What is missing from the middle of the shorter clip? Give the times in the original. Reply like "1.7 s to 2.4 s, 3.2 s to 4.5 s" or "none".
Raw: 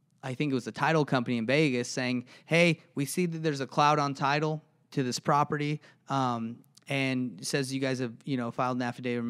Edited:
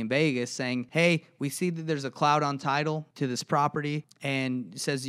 2.2 s to 2.4 s, 4.6 s to 4.8 s, 5.9 s to 6.8 s